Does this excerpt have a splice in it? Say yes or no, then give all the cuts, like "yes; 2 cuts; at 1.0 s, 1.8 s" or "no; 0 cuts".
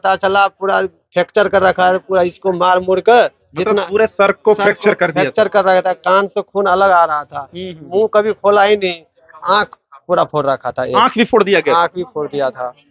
no; 0 cuts